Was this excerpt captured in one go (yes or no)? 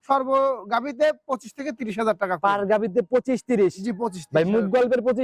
yes